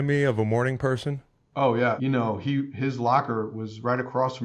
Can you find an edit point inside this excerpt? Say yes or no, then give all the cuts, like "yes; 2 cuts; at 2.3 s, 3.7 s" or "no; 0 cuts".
yes; 1 cut; at 2.0 s